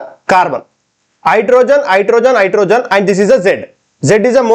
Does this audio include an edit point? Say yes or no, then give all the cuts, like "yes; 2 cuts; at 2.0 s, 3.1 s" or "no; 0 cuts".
no; 0 cuts